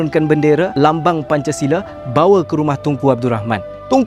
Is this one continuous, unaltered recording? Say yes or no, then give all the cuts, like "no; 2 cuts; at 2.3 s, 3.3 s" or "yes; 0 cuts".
yes; 0 cuts